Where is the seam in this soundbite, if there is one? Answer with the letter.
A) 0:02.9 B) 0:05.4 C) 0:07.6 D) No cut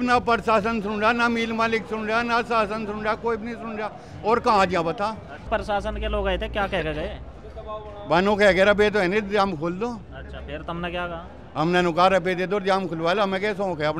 B